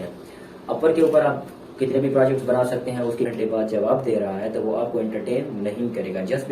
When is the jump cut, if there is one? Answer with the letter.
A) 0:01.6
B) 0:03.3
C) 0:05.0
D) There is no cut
B